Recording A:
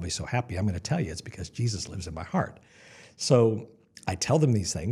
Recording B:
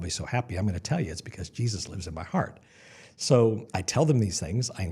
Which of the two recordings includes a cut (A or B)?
B